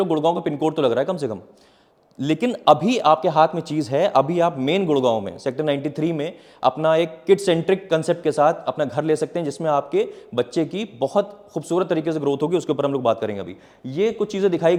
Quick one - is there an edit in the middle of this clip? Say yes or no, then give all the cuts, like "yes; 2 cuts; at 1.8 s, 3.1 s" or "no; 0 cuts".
no; 0 cuts